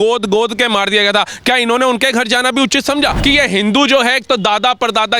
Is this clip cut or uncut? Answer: cut